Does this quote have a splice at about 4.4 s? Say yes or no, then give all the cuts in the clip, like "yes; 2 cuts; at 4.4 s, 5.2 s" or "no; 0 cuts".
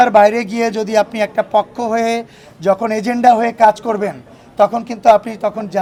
no; 0 cuts